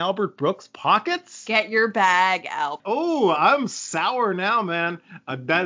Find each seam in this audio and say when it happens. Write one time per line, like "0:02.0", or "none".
0:02.8